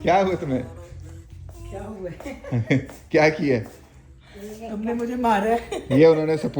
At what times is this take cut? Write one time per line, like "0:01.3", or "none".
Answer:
none